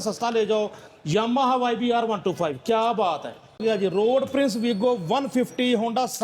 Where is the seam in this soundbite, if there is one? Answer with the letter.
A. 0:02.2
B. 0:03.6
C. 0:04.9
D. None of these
B